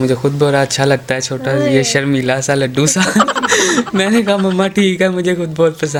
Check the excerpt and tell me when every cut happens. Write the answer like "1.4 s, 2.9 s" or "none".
none